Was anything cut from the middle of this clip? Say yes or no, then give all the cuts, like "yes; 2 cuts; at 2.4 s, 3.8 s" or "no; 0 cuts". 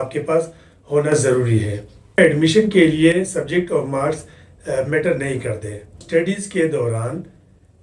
yes; 2 cuts; at 2.1 s, 6.0 s